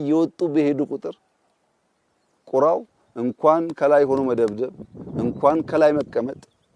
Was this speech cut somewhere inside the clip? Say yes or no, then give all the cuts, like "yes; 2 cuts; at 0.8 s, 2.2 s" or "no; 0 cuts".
no; 0 cuts